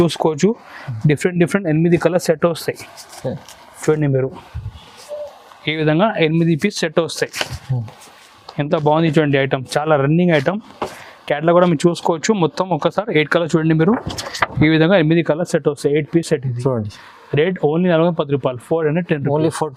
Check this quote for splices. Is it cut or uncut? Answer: uncut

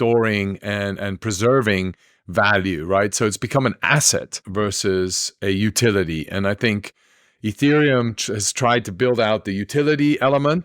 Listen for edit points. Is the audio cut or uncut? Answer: cut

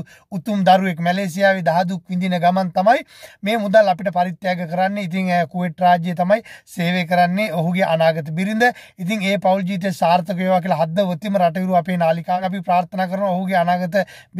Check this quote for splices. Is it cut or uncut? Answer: uncut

